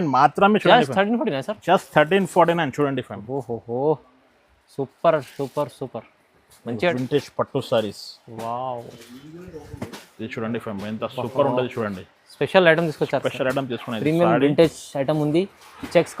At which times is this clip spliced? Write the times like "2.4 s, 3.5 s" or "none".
6.9 s